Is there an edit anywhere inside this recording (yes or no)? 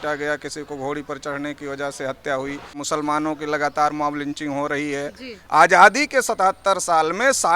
yes